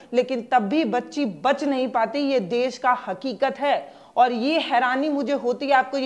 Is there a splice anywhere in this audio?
no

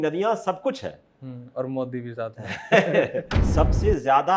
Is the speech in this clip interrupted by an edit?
yes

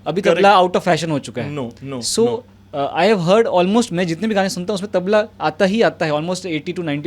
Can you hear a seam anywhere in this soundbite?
no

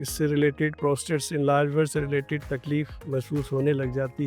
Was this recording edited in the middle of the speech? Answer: no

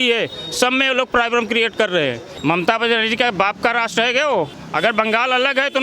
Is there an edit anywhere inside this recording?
yes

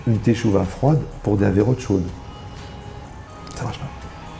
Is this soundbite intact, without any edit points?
no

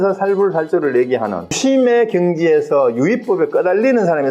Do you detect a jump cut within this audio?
yes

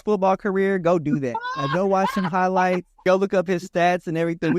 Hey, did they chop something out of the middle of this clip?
yes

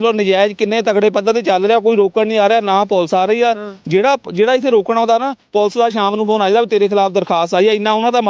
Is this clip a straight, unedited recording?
yes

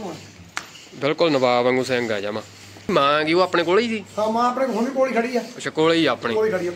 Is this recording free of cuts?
no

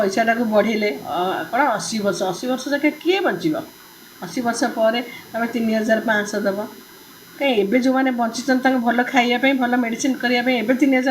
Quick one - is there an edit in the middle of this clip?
no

